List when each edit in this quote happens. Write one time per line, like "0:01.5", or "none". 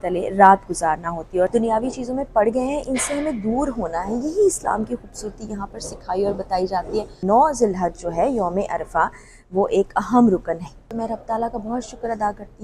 0:01.5
0:07.1
0:10.8